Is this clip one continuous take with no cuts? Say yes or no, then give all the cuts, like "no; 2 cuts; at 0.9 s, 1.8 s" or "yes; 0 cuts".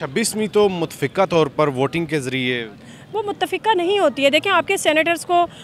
yes; 0 cuts